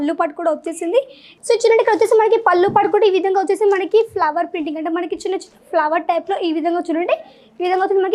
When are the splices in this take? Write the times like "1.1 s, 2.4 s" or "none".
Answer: 1.2 s

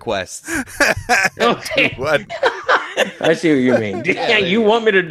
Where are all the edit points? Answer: 2.3 s

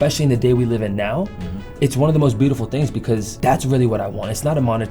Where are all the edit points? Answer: 3.3 s

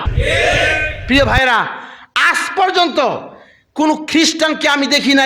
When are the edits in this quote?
none

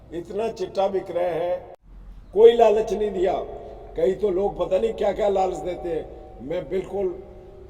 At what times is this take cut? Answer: 1.8 s

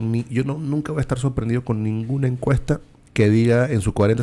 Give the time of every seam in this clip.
3.0 s

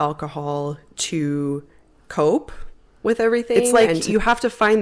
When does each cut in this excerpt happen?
3.7 s

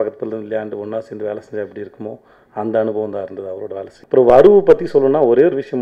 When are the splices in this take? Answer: 3.9 s

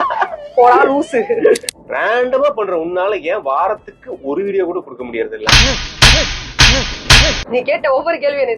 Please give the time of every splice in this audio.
1.7 s, 7.4 s

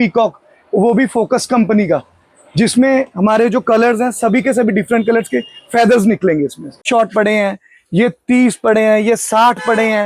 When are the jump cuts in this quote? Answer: 6.8 s

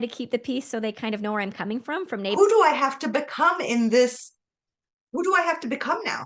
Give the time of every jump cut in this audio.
2.4 s

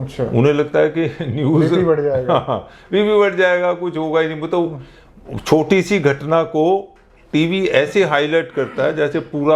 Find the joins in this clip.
none

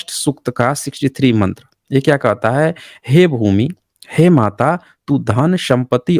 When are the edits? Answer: none

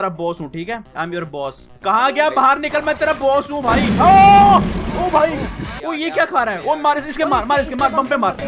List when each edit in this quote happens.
5.8 s

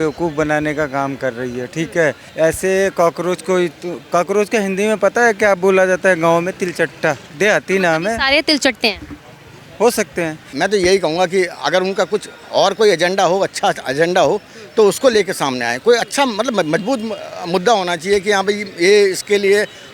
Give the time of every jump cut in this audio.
2.2 s, 7.3 s, 10.5 s

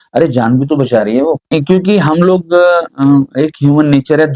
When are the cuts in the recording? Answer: 1.5 s

